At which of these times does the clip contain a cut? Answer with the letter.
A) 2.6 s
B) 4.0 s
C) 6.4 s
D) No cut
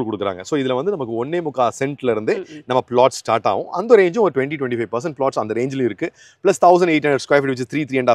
D